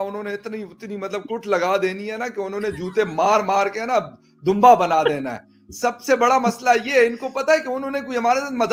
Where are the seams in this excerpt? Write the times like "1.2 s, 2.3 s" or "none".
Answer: none